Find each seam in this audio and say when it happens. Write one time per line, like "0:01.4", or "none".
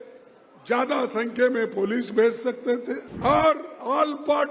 0:03.1